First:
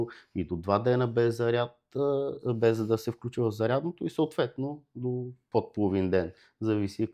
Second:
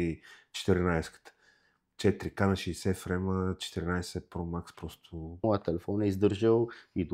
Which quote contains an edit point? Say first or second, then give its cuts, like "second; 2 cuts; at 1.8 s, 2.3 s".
second; 1 cut; at 5.4 s